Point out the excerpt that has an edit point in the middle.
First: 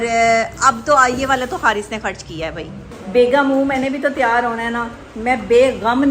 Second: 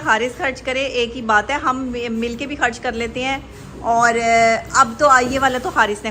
first; 1 cut; at 2.9 s

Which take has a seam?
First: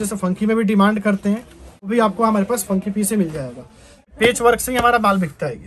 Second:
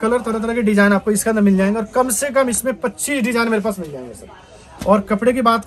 first; 2 cuts; at 1.9 s, 4.1 s

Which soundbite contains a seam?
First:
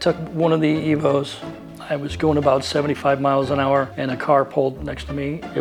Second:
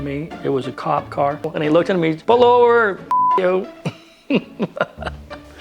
second; 1 cut; at 1.5 s

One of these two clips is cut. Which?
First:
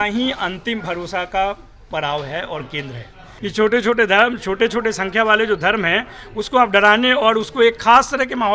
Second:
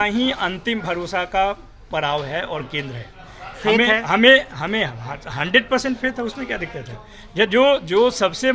first; 1 cut; at 3.2 s

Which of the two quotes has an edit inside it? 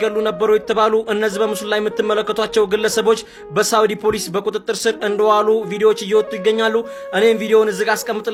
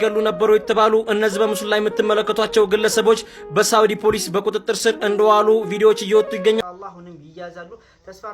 second; 1 cut; at 6.6 s

